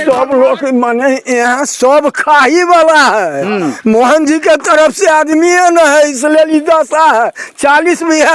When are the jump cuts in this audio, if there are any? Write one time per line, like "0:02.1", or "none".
none